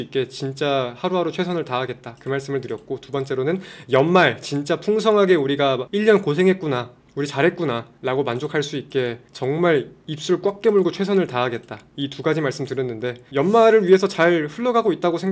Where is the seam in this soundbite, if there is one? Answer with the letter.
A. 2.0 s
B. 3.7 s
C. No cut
C